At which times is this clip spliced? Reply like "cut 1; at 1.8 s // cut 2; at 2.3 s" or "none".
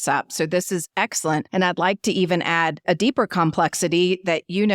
cut 1; at 1.5 s // cut 2; at 2.8 s